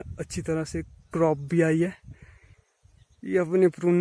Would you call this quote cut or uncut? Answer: uncut